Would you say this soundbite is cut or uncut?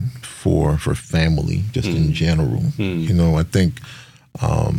uncut